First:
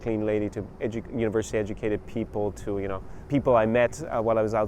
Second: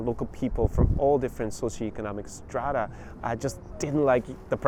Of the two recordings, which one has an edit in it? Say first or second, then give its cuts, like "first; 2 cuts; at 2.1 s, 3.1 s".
first; 1 cut; at 3.1 s